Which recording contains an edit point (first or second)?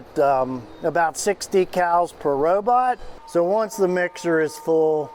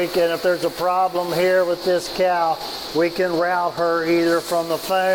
first